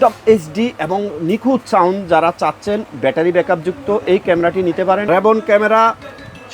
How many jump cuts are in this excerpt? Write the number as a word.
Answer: one